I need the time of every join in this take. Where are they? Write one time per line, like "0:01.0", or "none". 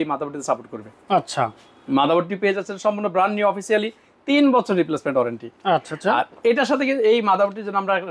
none